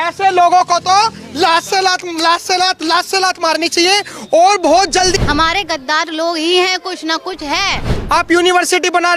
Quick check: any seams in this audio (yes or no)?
yes